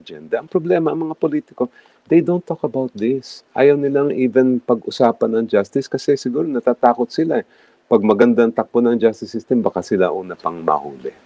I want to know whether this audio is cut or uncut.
uncut